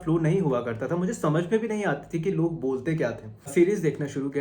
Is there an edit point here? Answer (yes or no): yes